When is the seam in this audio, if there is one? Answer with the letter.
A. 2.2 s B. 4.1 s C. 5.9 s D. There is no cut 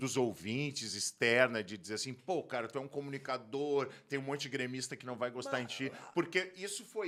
D